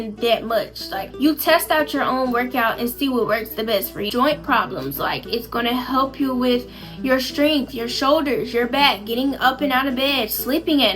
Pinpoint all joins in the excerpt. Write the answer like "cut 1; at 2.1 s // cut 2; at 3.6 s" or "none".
cut 1; at 1.1 s // cut 2; at 4.1 s